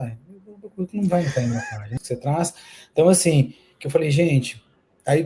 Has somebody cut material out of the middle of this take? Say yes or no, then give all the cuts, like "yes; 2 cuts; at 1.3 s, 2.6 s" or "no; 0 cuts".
yes; 1 cut; at 2.0 s